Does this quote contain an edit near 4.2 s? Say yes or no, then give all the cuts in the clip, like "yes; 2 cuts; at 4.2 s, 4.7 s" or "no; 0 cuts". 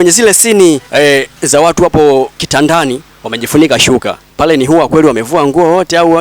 yes; 3 cuts; at 0.9 s, 2.9 s, 4.2 s